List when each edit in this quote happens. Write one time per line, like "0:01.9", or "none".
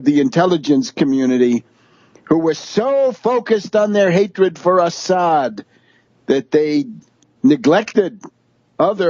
0:03.2